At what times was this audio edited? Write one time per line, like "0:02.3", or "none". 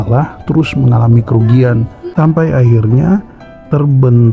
0:02.0